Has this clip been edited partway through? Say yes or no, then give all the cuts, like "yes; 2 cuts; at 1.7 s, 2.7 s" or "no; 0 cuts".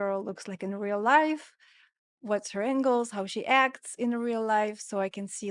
no; 0 cuts